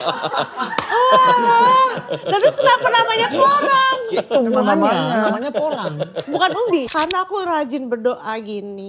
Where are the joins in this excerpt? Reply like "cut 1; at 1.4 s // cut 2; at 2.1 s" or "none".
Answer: cut 1; at 6.9 s